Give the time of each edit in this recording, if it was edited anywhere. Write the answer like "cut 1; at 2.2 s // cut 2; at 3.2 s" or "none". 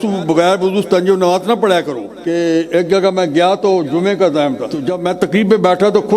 cut 1; at 2.1 s // cut 2; at 4.9 s